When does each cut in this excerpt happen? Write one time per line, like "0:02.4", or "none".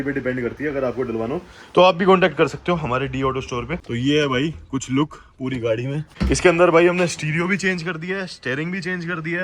0:03.8
0:06.1